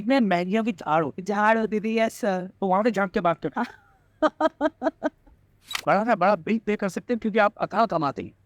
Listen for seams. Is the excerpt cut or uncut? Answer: cut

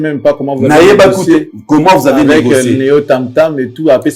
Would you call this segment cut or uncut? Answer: uncut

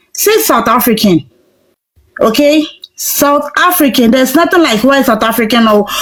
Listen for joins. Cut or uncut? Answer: uncut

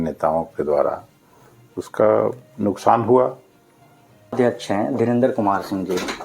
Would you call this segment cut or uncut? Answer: cut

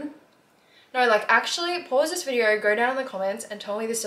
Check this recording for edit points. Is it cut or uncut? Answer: uncut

